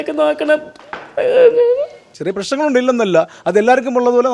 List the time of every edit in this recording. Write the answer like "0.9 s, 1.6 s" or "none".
2.1 s